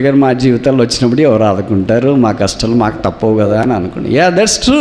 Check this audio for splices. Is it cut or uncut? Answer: uncut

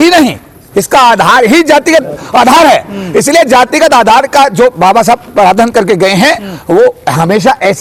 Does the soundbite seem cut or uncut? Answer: uncut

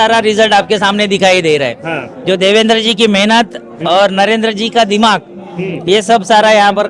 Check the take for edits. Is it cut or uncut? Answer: uncut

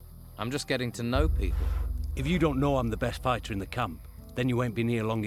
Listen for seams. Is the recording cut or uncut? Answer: uncut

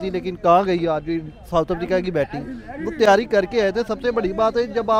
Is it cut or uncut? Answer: uncut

